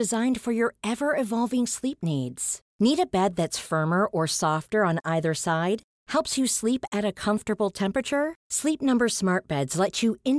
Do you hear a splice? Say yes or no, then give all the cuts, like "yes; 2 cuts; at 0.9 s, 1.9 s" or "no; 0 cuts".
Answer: no; 0 cuts